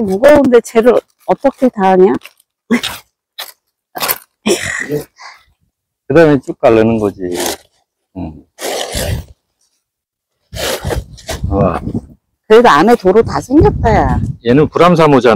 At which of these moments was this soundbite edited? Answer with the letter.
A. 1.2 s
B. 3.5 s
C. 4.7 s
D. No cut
C